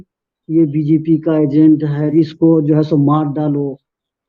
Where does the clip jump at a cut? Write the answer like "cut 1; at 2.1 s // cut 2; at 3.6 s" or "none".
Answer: cut 1; at 2.1 s